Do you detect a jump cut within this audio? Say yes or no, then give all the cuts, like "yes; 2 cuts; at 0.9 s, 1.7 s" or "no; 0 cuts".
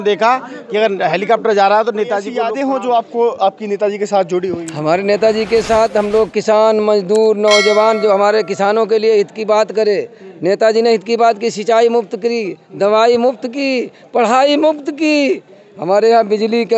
yes; 1 cut; at 2.4 s